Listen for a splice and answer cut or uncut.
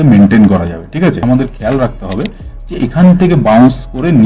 cut